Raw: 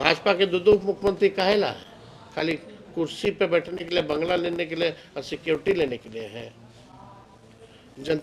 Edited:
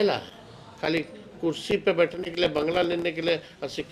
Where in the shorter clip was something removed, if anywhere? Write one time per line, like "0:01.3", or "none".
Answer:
none